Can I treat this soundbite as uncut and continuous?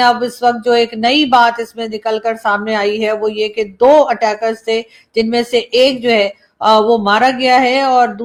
yes; 0 cuts

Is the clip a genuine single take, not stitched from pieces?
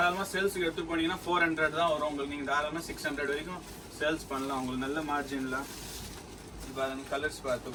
yes; 0 cuts

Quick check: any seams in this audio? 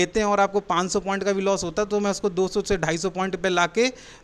no; 0 cuts

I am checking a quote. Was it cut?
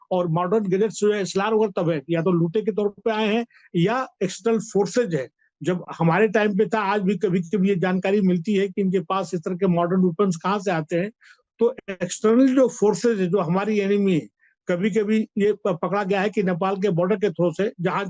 no; 0 cuts

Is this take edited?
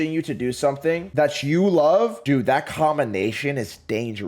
no; 0 cuts

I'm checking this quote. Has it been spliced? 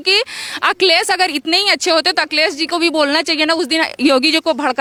no; 0 cuts

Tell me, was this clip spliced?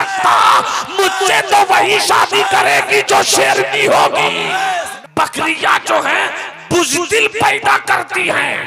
yes; 1 cut; at 4.9 s

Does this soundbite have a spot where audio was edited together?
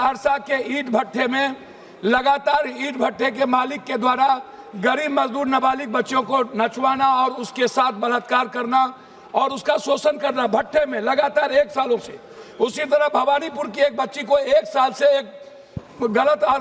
no; 0 cuts

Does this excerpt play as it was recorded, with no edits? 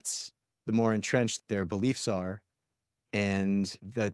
yes; 0 cuts

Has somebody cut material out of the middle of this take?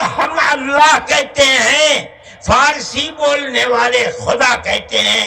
no; 0 cuts

